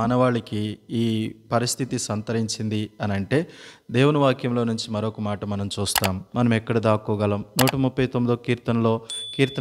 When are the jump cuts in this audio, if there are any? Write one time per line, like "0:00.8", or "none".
0:06.2

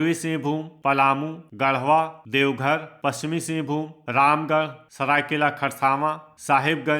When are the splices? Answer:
0:01.0
0:02.2
0:04.8

